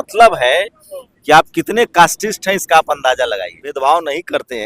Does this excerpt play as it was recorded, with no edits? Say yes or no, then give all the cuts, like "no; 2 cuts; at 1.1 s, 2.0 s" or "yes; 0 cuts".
no; 1 cut; at 3.7 s